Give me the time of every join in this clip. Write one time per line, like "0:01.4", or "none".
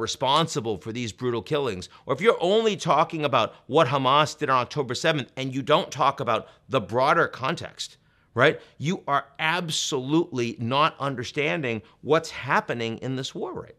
none